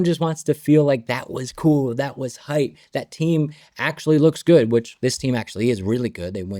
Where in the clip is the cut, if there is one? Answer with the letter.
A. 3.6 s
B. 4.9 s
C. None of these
B